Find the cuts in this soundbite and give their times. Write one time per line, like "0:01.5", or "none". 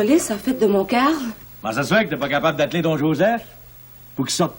0:01.5